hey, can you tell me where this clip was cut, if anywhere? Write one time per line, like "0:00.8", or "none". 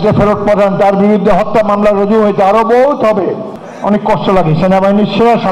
0:03.5